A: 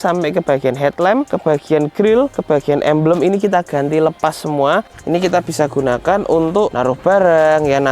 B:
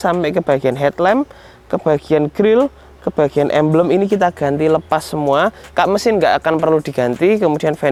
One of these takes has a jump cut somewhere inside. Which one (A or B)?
A